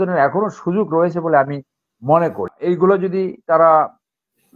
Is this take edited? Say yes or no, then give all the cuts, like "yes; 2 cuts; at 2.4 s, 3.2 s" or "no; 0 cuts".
yes; 1 cut; at 2.6 s